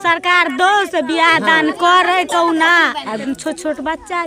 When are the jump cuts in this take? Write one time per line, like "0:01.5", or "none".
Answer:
0:03.2